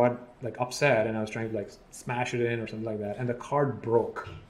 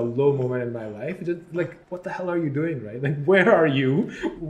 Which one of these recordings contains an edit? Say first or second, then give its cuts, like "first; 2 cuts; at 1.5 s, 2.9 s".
second; 1 cut; at 1.8 s